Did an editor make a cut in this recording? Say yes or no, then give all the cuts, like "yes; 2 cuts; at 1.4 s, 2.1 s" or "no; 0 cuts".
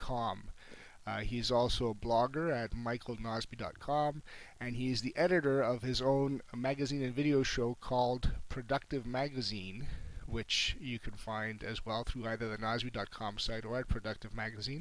no; 0 cuts